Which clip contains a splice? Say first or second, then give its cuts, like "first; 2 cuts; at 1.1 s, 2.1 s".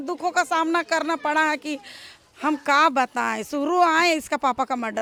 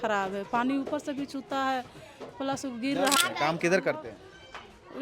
second; 1 cut; at 3.2 s